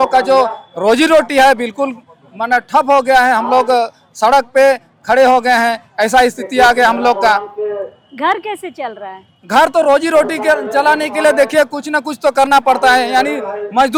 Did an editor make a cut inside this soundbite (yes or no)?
no